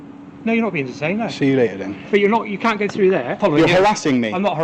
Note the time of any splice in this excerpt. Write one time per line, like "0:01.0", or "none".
0:03.4